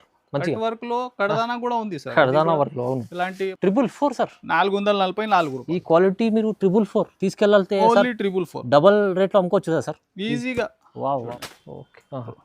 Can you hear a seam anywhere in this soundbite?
yes; 2 cuts; at 3.5 s, 11.3 s

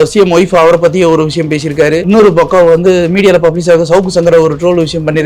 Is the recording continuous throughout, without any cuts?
no; 1 cut; at 2.0 s

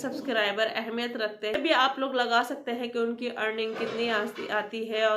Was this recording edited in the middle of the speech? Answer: yes; 1 cut; at 1.6 s

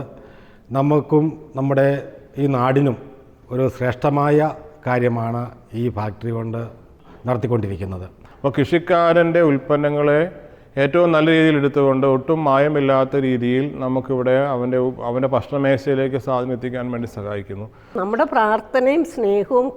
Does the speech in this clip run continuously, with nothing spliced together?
no; 2 cuts; at 8.3 s, 17.9 s

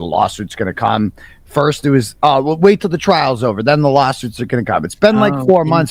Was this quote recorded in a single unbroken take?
yes; 0 cuts

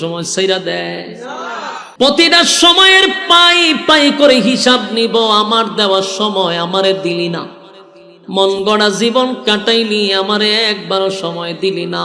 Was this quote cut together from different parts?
yes; 1 cut; at 1.8 s

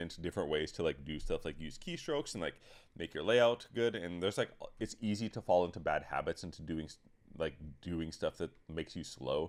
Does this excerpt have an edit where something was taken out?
no; 0 cuts

